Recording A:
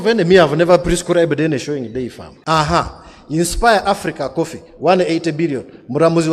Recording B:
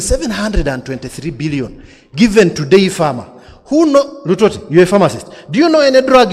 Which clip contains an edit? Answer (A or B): A